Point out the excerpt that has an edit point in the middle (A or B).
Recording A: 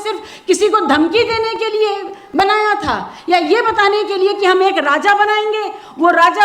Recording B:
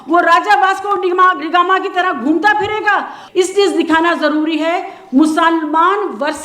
B